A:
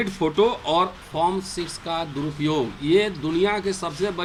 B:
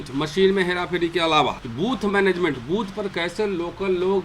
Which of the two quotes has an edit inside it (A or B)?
B